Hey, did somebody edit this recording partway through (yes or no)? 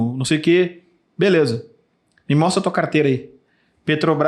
no